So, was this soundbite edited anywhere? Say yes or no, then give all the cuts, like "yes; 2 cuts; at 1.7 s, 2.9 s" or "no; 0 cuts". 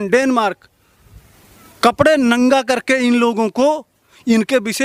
no; 0 cuts